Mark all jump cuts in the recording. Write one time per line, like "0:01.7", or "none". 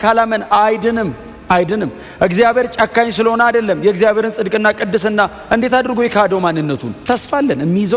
0:06.9